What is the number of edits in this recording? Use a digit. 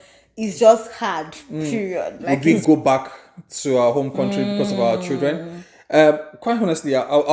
1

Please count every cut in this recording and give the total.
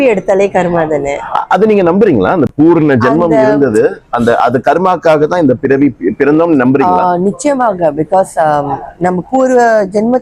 0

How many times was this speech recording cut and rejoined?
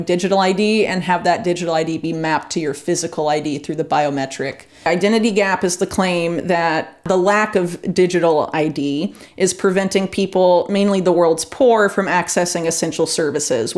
1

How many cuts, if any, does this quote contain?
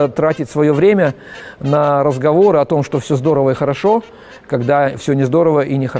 0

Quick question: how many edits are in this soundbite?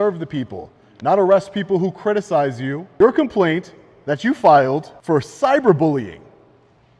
2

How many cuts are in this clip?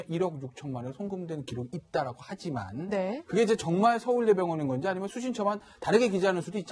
1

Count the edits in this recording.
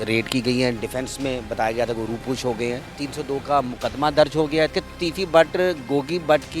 2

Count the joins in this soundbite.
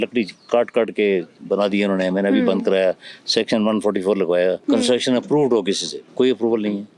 1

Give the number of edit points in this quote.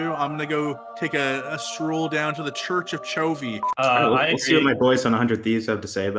1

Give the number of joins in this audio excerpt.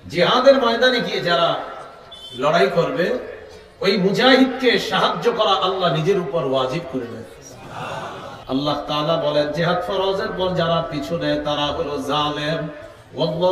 1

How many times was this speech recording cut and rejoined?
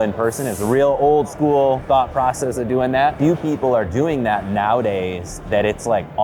1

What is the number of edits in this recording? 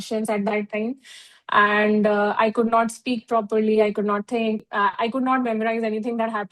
1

